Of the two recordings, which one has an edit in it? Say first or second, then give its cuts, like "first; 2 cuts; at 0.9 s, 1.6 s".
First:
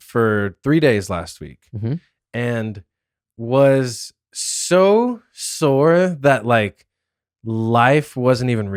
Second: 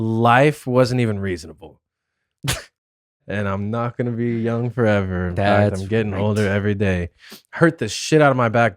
second; 1 cut; at 3.2 s